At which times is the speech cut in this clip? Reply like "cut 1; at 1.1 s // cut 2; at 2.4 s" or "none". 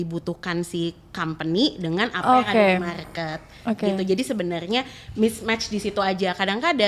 none

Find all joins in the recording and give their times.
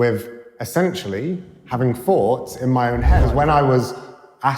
cut 1; at 3.2 s

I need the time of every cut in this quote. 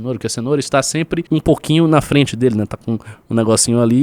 cut 1; at 1.2 s

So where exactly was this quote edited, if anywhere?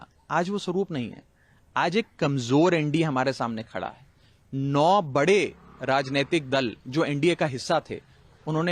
none

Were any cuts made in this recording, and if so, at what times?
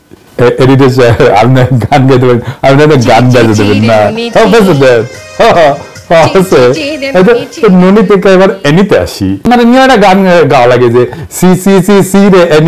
cut 1; at 9.4 s

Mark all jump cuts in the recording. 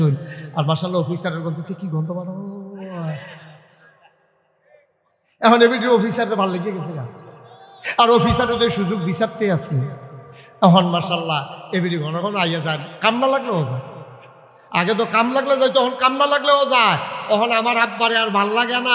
none

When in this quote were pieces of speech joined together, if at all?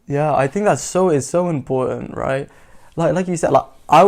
none

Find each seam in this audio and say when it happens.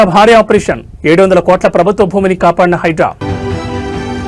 cut 1; at 3.2 s

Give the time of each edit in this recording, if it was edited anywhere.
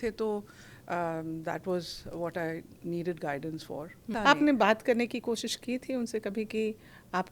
cut 1; at 4.1 s

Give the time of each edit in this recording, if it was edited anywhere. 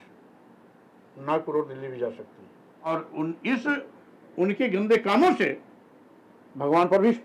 cut 1; at 2.7 s

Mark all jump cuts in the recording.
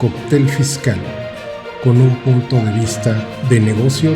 none

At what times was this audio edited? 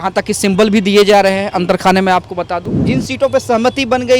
cut 1; at 2.7 s

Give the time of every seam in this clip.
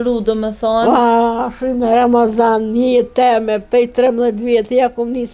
none

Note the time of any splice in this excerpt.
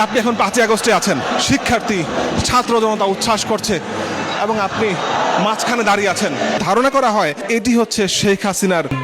cut 1; at 1.3 s // cut 2; at 6.6 s

